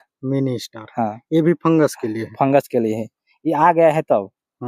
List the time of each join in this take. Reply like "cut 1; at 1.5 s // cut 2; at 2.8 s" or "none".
none